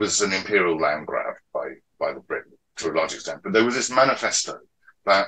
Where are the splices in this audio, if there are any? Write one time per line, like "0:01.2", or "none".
none